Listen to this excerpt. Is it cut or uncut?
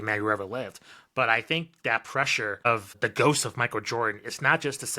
cut